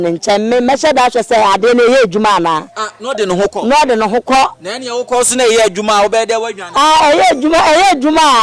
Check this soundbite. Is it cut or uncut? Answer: uncut